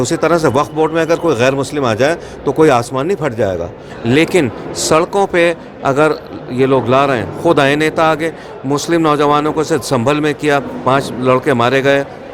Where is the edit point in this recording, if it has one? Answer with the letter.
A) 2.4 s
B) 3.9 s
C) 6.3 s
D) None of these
B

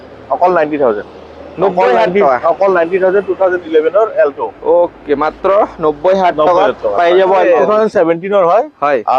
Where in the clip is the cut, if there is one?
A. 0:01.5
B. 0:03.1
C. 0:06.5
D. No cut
D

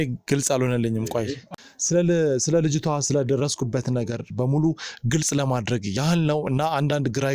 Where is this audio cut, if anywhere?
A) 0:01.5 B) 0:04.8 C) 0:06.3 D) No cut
A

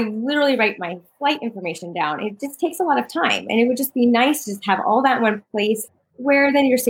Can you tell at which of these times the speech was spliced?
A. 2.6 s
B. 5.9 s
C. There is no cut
B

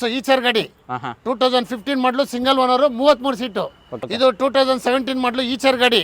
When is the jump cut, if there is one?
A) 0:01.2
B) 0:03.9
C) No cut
B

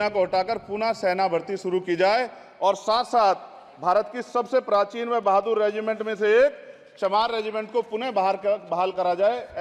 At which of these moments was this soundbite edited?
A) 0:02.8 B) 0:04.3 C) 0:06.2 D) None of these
D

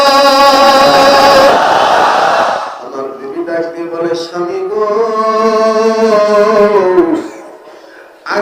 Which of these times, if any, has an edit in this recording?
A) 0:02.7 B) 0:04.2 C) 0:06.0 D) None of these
A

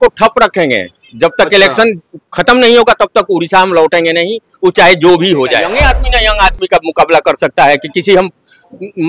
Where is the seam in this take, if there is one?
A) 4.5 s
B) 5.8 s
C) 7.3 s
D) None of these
B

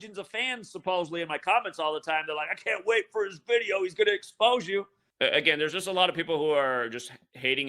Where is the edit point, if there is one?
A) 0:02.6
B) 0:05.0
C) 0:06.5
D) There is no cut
B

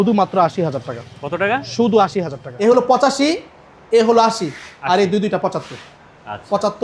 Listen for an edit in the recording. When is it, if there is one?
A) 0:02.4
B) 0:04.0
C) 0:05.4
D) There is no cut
A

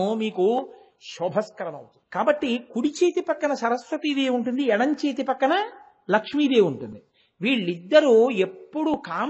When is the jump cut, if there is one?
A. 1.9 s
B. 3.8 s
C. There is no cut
A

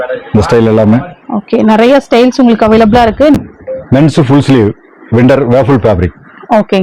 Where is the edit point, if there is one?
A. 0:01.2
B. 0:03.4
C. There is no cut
B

